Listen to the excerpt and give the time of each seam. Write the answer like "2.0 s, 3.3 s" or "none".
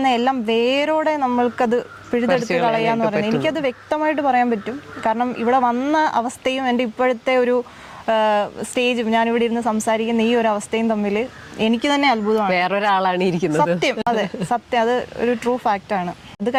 none

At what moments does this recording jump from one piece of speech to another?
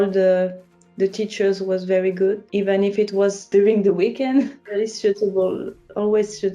2.4 s, 3.4 s, 4.6 s

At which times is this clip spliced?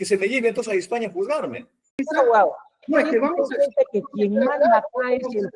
2.0 s

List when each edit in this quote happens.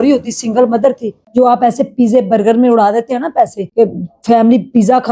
1.1 s, 3.6 s

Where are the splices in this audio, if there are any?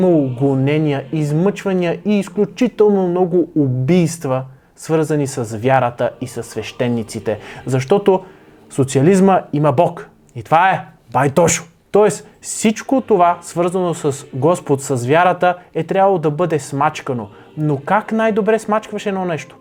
none

